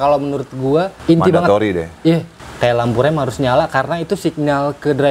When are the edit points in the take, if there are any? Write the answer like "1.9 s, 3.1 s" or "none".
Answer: 0.9 s, 2.4 s